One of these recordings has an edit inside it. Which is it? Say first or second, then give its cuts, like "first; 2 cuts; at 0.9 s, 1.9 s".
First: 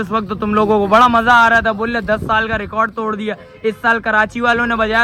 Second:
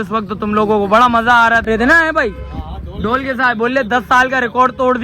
second; 1 cut; at 1.7 s